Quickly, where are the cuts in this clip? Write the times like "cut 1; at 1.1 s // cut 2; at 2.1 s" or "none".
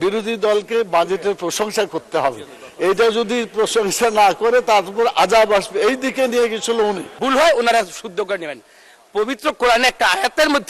cut 1; at 7.1 s